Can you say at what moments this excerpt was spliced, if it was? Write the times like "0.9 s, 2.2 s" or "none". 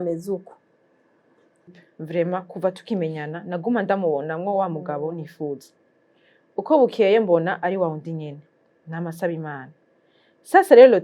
1.9 s